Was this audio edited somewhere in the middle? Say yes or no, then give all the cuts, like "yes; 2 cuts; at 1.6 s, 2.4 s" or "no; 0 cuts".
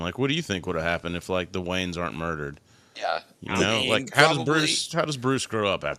no; 0 cuts